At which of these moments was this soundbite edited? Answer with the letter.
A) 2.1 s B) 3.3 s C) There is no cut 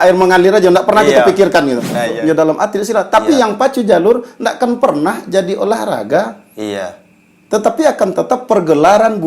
A